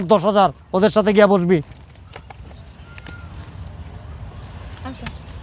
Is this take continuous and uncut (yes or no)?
yes